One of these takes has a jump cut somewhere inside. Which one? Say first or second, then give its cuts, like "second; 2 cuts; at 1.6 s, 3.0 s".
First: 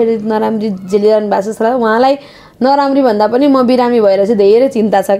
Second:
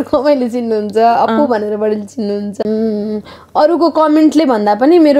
second; 1 cut; at 2.6 s